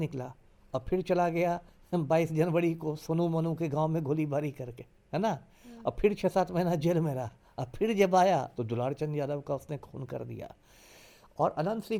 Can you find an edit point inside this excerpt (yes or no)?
no